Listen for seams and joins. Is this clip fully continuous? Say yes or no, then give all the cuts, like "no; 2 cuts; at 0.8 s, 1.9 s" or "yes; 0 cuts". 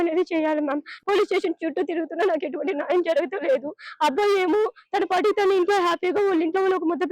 no; 1 cut; at 0.9 s